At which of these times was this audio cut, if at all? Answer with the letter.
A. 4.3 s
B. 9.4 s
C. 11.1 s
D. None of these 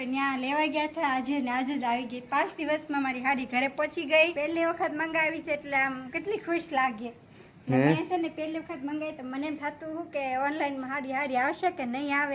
A